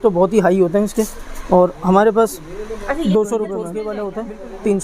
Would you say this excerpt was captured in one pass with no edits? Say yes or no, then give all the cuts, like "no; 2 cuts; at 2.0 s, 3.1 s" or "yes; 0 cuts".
no; 1 cut; at 3.8 s